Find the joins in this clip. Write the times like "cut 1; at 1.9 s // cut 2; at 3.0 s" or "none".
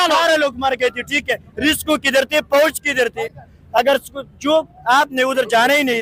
none